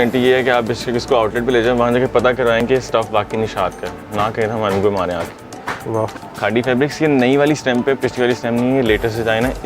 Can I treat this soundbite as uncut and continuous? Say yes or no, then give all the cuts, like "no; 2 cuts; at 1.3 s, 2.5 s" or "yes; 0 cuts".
no; 1 cut; at 6.2 s